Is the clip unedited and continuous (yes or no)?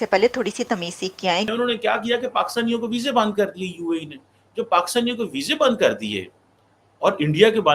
no